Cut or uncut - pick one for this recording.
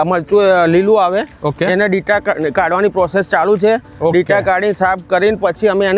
uncut